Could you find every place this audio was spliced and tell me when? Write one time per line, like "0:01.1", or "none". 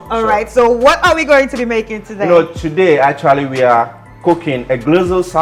none